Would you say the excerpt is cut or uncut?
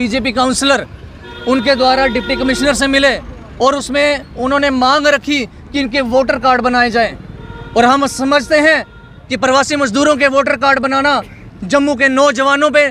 uncut